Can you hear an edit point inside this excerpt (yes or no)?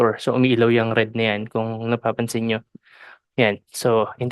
no